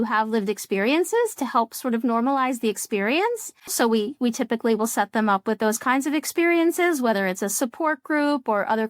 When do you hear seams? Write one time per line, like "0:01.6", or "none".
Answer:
0:03.7

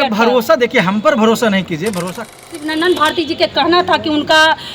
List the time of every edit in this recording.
0:02.3

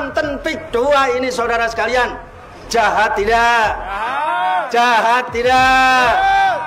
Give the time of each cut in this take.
none

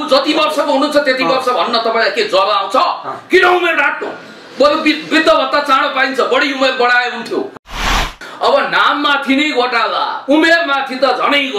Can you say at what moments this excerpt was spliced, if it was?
0:07.9

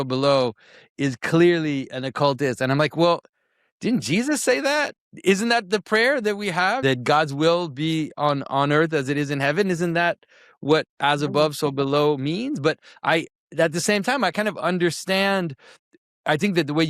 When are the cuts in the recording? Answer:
0:05.0
0:06.8

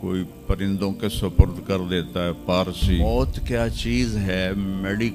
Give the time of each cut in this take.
0:03.0

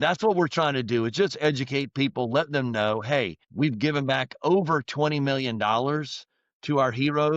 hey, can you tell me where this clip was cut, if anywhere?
0:03.4

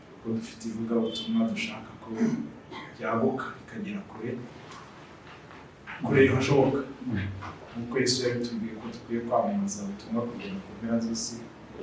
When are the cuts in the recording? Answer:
none

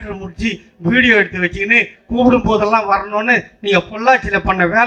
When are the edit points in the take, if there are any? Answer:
none

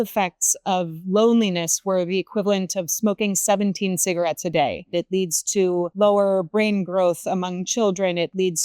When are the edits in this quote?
0:04.8

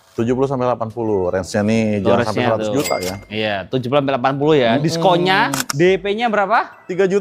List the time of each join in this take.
0:05.7

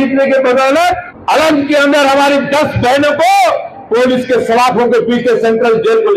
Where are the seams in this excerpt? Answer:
0:01.1

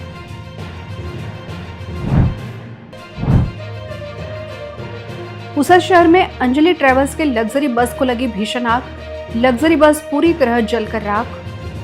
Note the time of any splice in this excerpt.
0:01.8

